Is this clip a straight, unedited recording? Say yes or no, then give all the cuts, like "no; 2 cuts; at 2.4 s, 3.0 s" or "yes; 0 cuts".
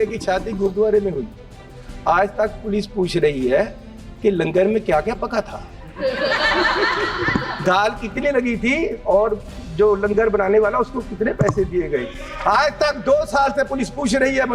yes; 0 cuts